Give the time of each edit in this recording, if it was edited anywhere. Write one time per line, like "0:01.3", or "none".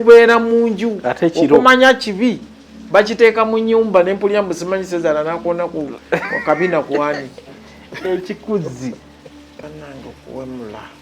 0:09.6